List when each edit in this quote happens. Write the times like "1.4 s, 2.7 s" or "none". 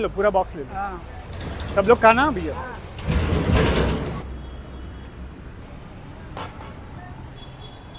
4.3 s, 5.6 s